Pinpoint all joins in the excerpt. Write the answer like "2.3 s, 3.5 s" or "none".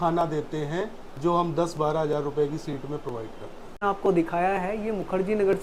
none